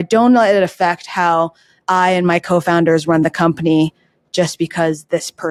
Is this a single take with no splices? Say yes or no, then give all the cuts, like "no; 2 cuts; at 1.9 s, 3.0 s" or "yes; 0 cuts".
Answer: yes; 0 cuts